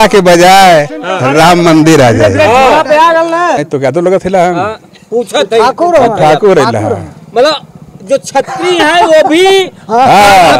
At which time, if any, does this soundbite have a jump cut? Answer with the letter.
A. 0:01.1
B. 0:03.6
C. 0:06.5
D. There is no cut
B